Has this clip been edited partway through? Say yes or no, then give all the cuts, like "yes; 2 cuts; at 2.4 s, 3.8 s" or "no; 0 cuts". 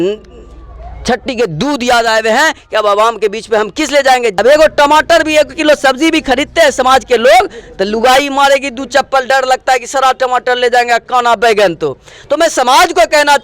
yes; 1 cut; at 4.4 s